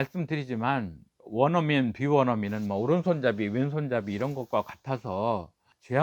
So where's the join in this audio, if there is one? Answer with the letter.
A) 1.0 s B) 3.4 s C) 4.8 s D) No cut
D